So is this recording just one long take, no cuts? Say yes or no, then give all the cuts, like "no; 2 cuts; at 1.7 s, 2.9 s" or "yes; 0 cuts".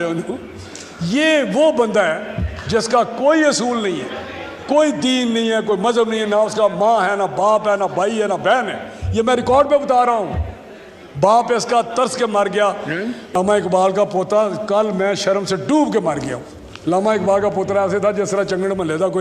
no; 1 cut; at 13.2 s